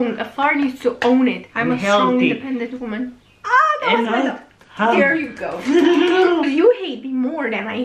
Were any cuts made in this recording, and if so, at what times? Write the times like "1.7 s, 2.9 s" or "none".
1.5 s, 6.5 s

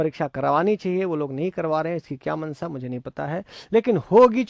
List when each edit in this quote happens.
none

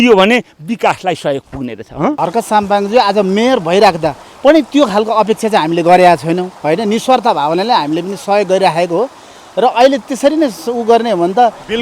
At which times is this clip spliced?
2.2 s

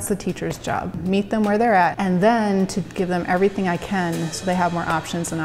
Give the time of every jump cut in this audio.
0.9 s, 2.0 s

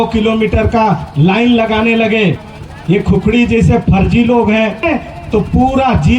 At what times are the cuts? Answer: 2.5 s, 4.8 s

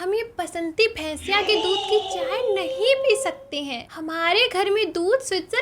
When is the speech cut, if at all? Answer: 4.0 s

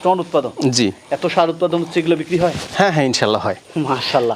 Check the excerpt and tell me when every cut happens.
none

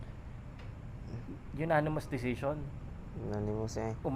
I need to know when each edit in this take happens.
none

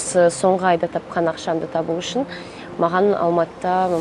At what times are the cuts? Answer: none

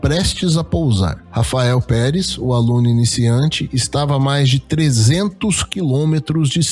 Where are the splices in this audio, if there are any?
1.2 s

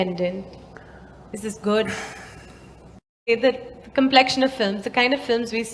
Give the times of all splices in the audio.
3.3 s

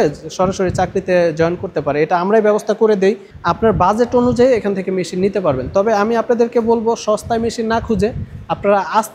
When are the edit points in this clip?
3.3 s

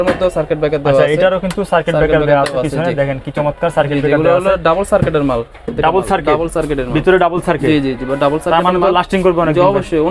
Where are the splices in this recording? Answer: none

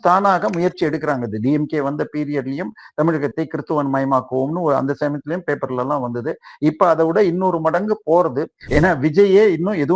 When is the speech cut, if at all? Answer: 8.6 s

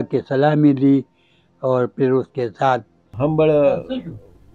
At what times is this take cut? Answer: 3.1 s

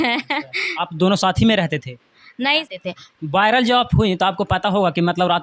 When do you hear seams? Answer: 2.6 s

